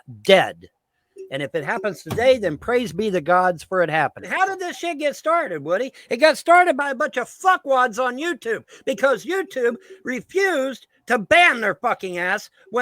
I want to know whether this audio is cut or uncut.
cut